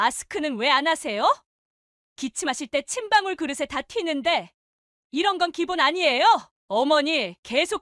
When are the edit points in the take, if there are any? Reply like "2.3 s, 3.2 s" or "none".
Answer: 6.5 s